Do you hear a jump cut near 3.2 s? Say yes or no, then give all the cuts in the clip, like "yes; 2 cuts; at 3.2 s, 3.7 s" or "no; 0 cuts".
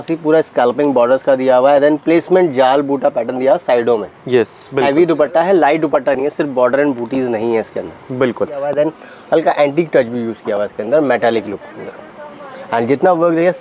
no; 1 cut; at 8.7 s